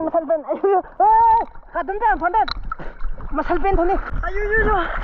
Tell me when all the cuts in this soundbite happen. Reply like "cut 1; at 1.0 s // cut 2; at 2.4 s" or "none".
cut 1; at 4.1 s